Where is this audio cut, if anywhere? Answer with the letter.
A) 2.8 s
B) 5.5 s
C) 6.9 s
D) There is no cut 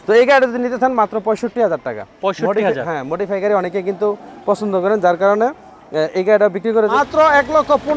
C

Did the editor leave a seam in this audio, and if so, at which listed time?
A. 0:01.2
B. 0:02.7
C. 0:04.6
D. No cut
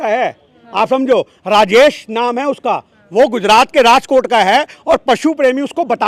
D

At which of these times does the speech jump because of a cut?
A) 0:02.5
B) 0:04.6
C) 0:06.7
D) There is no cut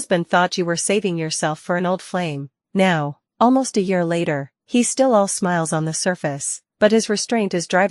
A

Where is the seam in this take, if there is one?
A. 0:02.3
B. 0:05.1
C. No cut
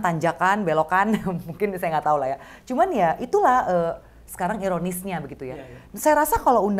C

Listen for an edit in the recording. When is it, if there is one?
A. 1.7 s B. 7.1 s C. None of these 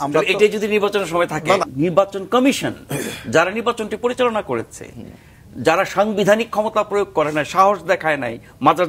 A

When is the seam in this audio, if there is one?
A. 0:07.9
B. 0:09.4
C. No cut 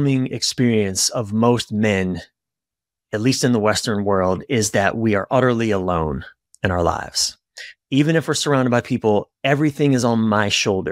C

